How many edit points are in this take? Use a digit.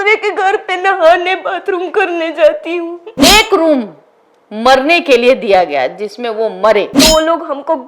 2